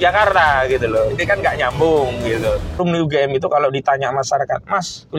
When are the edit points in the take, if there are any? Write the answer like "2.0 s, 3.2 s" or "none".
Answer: 2.8 s